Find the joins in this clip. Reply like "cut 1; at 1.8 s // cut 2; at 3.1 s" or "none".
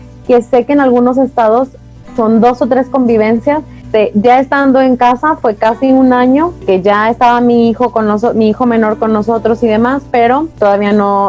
cut 1; at 3.8 s // cut 2; at 6.6 s // cut 3; at 10.6 s